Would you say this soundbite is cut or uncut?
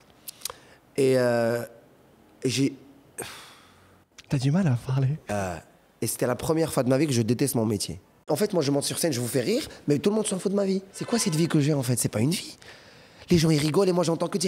cut